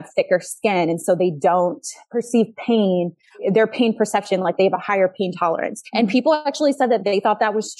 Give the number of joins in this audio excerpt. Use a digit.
1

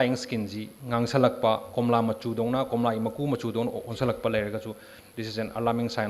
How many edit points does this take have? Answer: 0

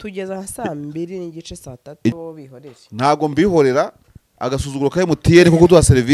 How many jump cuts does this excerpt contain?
1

